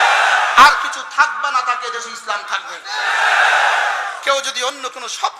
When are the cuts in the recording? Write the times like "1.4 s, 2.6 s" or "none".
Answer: none